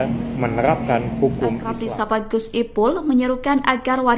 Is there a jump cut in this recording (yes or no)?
yes